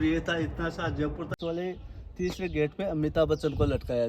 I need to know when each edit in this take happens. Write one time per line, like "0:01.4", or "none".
0:01.4